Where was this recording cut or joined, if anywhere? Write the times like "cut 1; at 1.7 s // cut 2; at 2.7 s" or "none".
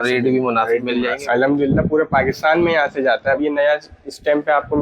cut 1; at 1.2 s // cut 2; at 3.4 s